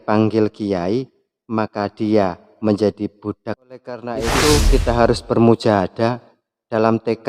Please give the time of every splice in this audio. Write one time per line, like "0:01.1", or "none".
0:04.2